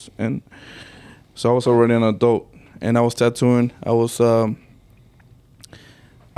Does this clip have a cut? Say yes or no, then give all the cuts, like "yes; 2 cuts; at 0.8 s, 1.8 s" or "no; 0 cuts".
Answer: no; 0 cuts